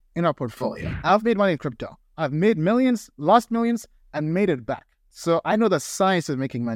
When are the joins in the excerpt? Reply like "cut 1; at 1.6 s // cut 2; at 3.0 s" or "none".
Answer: cut 1; at 0.9 s